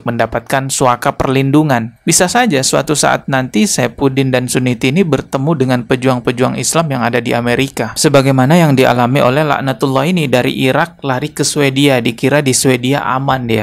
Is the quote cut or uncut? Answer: cut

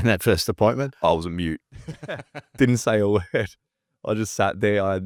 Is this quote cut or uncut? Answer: uncut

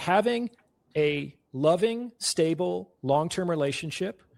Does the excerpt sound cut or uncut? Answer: uncut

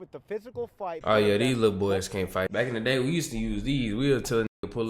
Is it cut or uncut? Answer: cut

